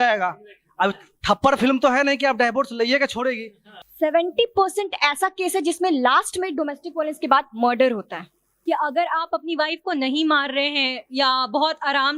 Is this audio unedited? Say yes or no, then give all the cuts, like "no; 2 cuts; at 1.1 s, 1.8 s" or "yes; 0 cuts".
no; 2 cuts; at 3.8 s, 8.5 s